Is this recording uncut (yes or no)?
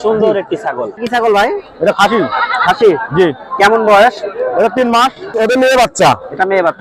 no